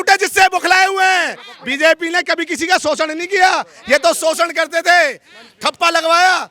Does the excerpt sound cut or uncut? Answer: uncut